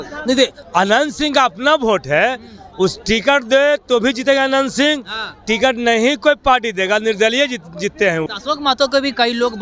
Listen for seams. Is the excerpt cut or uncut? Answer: cut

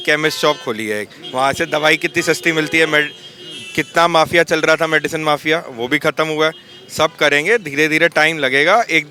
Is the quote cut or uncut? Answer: uncut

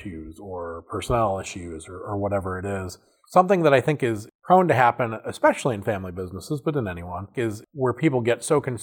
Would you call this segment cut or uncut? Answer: cut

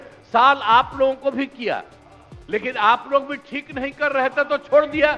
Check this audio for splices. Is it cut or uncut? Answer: uncut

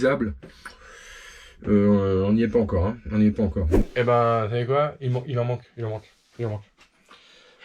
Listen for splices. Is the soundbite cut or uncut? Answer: cut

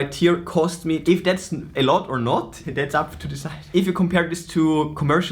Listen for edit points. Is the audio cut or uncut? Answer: cut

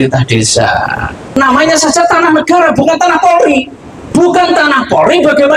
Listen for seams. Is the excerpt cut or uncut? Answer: cut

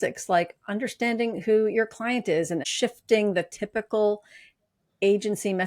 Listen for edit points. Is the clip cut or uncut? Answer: cut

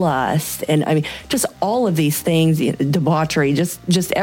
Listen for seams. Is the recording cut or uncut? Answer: uncut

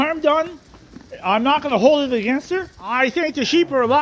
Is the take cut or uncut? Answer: cut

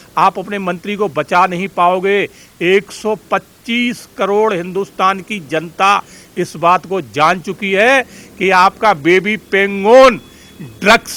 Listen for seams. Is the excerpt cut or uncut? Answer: uncut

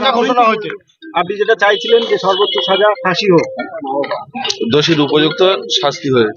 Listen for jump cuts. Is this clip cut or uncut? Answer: uncut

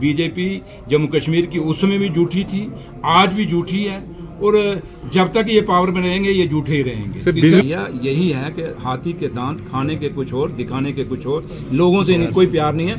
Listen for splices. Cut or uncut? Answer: cut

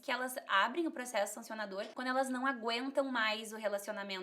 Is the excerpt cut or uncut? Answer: cut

